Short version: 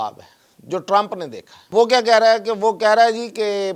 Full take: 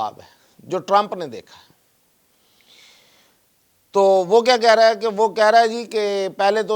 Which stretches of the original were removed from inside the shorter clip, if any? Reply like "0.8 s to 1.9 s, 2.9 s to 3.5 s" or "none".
1.7 s to 4.3 s